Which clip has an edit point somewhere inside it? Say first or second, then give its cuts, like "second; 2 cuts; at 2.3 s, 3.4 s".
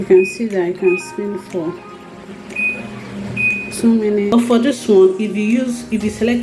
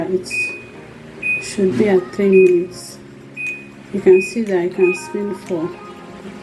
first; 1 cut; at 4.3 s